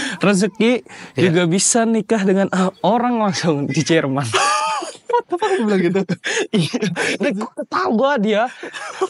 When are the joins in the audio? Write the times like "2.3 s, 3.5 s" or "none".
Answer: none